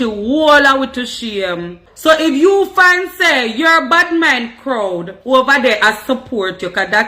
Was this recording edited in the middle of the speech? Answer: yes; 1 cut; at 1.8 s

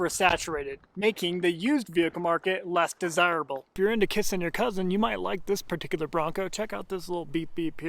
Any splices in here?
yes; 1 cut; at 3.7 s

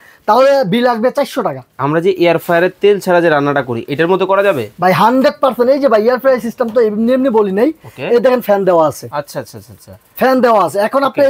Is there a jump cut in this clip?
yes; 1 cut; at 1.7 s

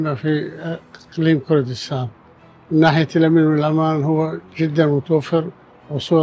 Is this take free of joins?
yes; 0 cuts

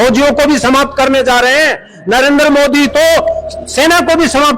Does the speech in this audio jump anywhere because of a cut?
no; 0 cuts

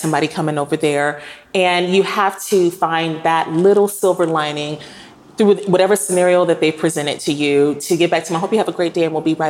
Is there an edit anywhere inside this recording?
no; 0 cuts

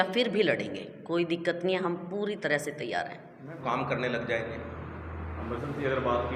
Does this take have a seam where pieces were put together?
yes; 1 cut; at 3.5 s

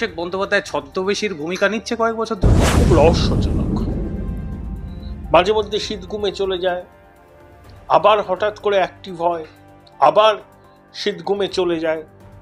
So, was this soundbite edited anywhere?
yes; 1 cut; at 2.7 s

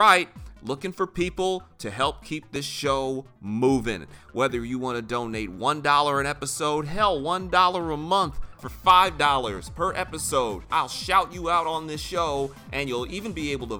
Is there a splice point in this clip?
no; 0 cuts

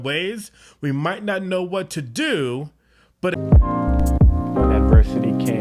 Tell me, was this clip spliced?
yes; 1 cut; at 3.3 s

